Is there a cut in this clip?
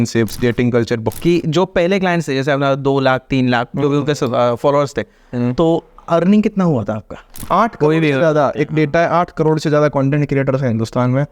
yes; 2 cuts; at 1.1 s, 7.4 s

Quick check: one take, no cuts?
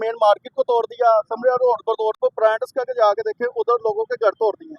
no; 1 cut; at 2.2 s

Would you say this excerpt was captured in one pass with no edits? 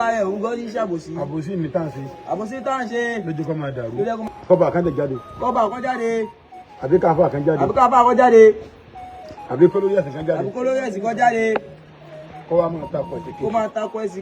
no; 1 cut; at 4.3 s

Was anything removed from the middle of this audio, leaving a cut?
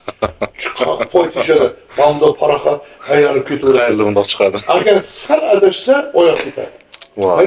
no; 0 cuts

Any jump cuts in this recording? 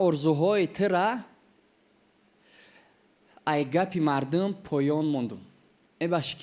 no; 0 cuts

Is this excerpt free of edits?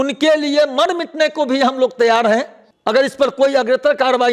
yes; 0 cuts

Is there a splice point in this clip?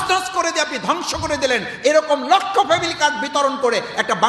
no; 0 cuts

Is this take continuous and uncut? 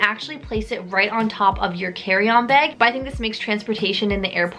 yes; 0 cuts

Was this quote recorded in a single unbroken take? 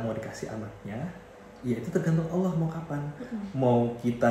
yes; 0 cuts

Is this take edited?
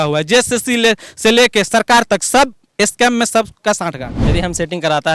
yes; 1 cut; at 4.1 s

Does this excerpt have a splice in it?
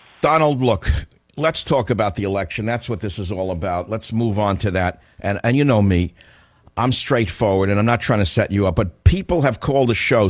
no; 0 cuts

